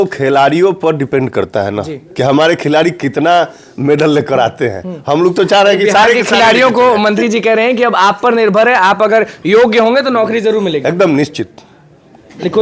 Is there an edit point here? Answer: no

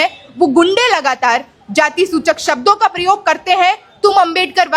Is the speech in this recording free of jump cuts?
yes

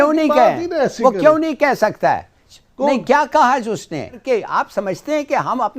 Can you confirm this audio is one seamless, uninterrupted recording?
no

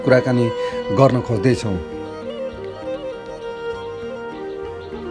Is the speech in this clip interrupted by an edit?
yes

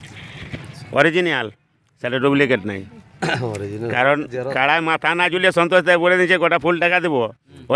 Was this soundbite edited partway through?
no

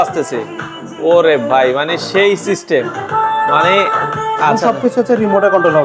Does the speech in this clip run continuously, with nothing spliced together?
yes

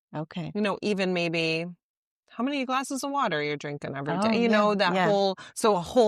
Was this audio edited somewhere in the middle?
no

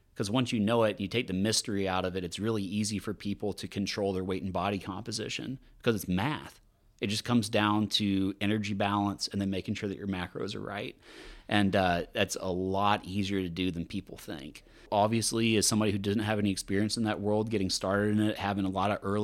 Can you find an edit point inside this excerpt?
yes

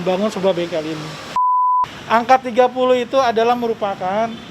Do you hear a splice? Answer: yes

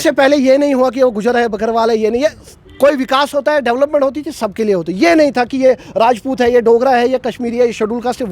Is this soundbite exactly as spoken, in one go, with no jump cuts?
yes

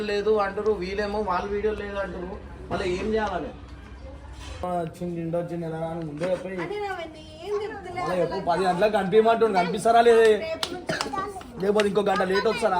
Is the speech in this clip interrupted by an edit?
yes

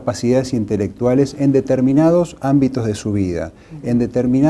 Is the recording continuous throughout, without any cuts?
no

